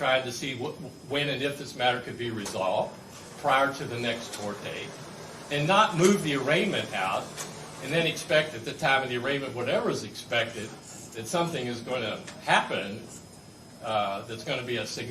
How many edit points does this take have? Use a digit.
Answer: 0